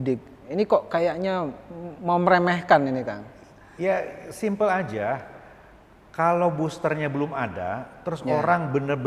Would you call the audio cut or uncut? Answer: uncut